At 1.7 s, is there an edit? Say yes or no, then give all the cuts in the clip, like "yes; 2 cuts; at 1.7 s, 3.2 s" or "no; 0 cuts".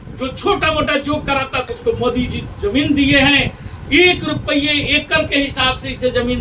yes; 1 cut; at 1.7 s